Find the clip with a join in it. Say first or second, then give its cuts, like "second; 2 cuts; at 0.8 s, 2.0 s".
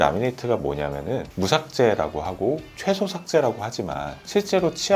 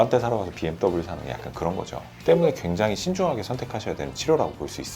second; 1 cut; at 2.1 s